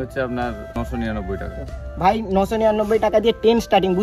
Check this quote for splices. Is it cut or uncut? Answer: uncut